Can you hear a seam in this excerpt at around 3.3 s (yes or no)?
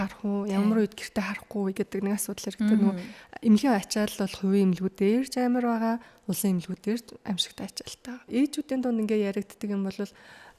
no